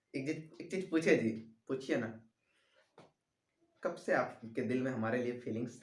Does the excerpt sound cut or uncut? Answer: uncut